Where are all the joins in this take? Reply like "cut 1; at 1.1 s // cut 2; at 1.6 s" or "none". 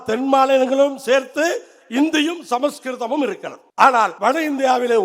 cut 1; at 3.5 s // cut 2; at 4.1 s